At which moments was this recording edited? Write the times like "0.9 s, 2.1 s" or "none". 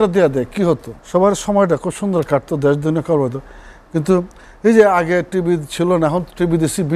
0.9 s